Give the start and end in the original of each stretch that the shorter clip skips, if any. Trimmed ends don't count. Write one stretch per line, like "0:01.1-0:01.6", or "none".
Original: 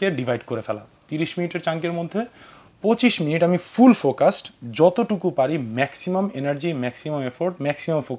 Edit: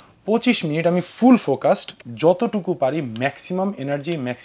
none